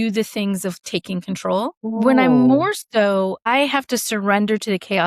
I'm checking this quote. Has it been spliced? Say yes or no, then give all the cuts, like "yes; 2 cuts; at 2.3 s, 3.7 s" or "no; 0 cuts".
yes; 2 cuts; at 2.0 s, 3.5 s